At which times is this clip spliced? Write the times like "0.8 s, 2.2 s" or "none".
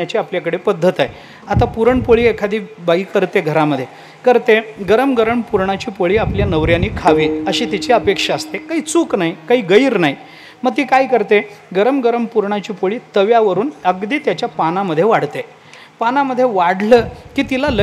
none

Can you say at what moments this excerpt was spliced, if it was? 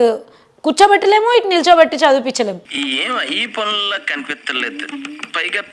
2.6 s

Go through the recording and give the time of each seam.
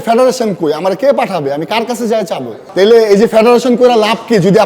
2.6 s

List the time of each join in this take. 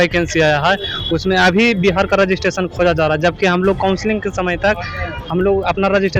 none

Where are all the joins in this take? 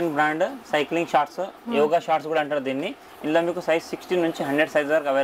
none

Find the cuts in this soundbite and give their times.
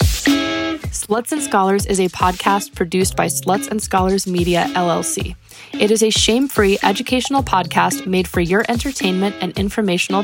0.9 s

